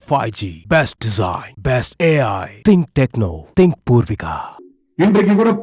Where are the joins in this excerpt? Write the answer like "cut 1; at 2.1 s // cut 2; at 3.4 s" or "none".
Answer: cut 1; at 4.5 s